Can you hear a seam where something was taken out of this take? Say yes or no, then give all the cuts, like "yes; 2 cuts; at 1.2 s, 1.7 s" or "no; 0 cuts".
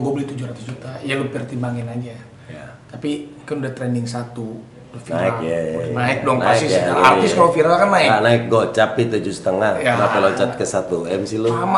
no; 0 cuts